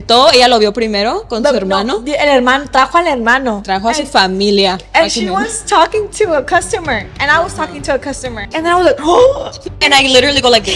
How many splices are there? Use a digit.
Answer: 2